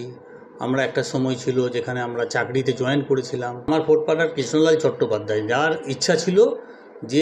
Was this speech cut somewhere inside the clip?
yes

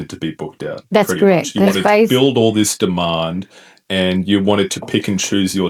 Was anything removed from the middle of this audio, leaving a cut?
no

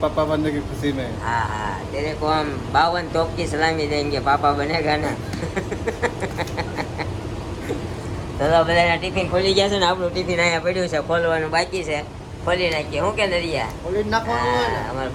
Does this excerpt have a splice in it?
no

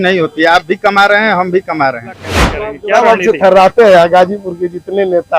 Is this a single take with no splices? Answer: no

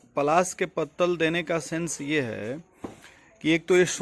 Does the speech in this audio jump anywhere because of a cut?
no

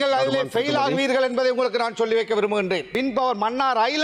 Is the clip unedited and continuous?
no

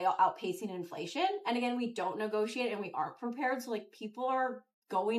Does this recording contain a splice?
no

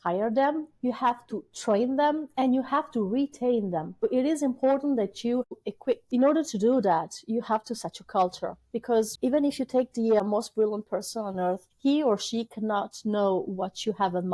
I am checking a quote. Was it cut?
yes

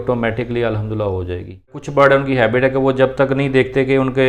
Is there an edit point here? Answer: yes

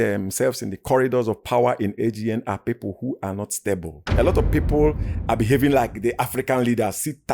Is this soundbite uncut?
yes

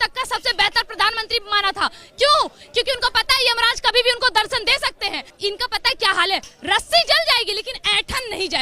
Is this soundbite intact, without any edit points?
no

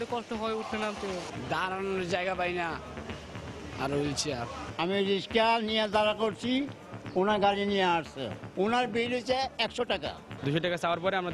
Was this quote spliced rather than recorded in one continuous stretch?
yes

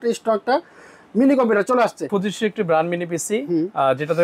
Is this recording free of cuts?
no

